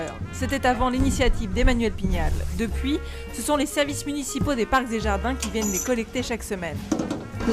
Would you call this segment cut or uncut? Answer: uncut